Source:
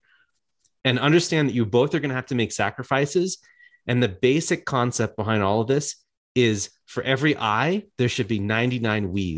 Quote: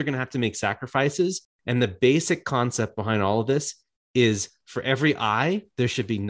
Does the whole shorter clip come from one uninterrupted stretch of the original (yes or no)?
no